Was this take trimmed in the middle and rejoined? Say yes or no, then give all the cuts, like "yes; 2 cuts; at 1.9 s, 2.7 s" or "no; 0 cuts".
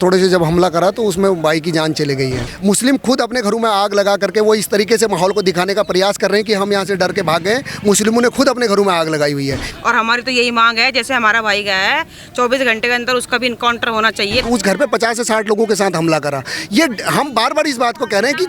yes; 3 cuts; at 2.5 s, 9.7 s, 14.4 s